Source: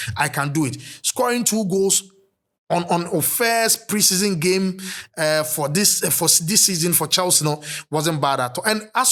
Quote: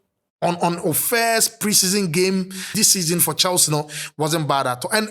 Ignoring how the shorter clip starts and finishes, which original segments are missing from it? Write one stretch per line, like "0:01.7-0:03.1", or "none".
0:04.9-0:06.4